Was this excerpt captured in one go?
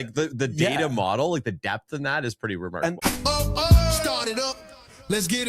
no; 1 cut; at 3.0 s

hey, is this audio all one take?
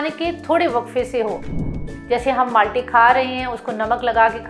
no; 1 cut; at 1.5 s

